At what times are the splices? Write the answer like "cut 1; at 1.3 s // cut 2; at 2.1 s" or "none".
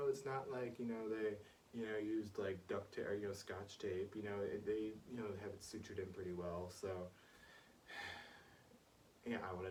none

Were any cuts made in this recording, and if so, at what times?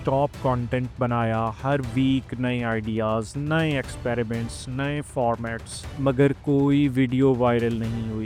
none

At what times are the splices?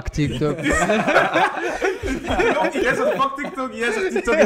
cut 1; at 2.8 s

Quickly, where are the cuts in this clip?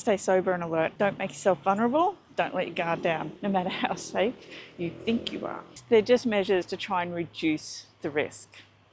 cut 1; at 0.9 s // cut 2; at 3.3 s // cut 3; at 5.8 s

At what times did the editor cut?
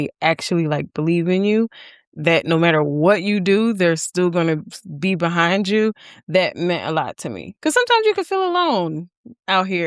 cut 1; at 7.4 s

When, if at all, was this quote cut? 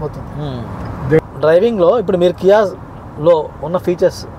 cut 1; at 1.2 s

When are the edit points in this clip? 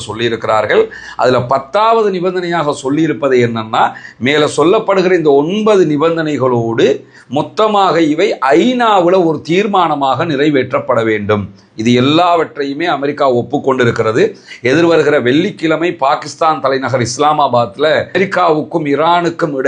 none

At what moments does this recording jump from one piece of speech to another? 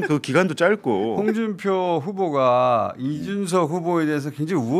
cut 1; at 1.2 s

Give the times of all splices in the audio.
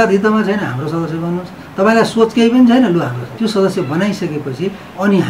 cut 1; at 3.2 s

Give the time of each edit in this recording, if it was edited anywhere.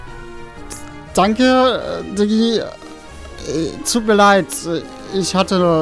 none

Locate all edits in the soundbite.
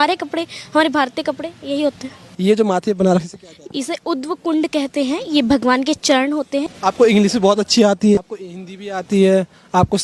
cut 1; at 2.2 s // cut 2; at 6.7 s // cut 3; at 8.2 s

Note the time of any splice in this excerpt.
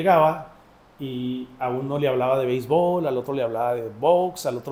none

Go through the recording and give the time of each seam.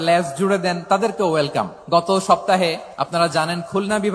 cut 1; at 1.8 s // cut 2; at 2.8 s

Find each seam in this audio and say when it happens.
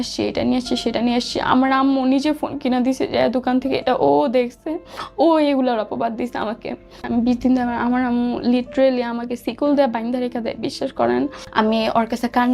cut 1; at 7.0 s // cut 2; at 11.4 s

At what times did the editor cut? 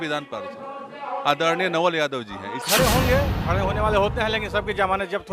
cut 1; at 2.6 s

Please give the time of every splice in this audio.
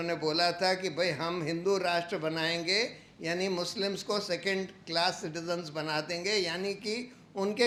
none

